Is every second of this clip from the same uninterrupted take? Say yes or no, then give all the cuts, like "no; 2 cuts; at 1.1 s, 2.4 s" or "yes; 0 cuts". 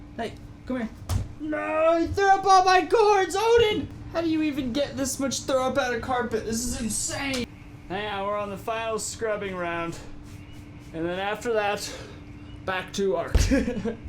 no; 1 cut; at 4.0 s